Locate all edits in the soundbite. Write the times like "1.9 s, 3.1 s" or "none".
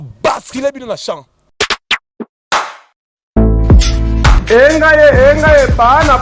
1.4 s